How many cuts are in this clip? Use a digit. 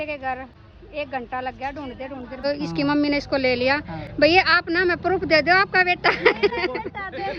1